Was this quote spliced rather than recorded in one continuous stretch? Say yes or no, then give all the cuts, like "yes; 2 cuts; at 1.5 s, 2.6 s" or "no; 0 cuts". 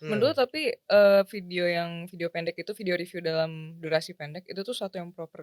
no; 0 cuts